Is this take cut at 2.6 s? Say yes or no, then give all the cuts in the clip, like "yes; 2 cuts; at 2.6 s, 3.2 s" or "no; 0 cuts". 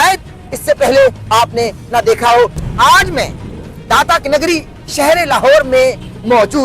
yes; 1 cut; at 2.6 s